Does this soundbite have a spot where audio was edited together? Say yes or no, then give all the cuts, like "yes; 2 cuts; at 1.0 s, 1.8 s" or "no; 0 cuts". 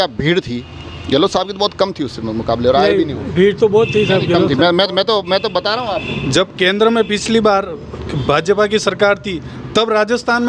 no; 0 cuts